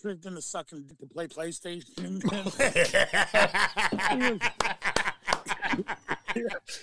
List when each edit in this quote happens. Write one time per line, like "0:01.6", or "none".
0:00.9

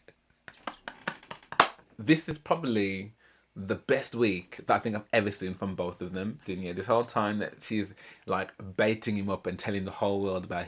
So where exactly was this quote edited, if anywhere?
0:01.9
0:06.5

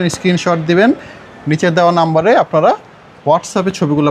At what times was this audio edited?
none

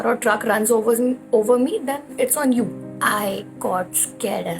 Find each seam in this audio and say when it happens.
0:02.8

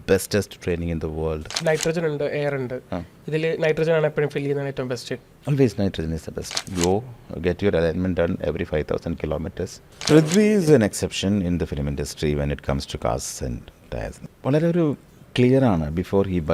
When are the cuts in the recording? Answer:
0:01.6
0:06.7
0:10.1
0:14.2

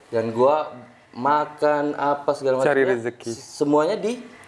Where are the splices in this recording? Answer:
none

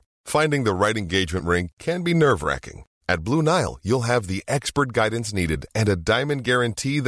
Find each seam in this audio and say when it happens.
none

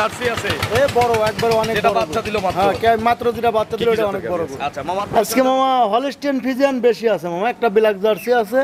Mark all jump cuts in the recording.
0:04.9

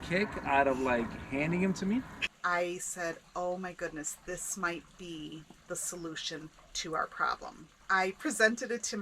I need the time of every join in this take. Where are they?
0:02.3
0:07.8

